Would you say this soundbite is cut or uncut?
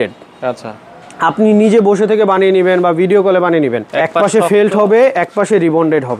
cut